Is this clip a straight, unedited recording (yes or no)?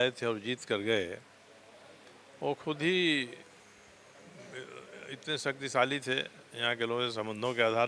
yes